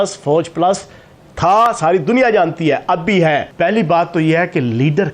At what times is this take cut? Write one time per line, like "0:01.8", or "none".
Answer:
0:03.5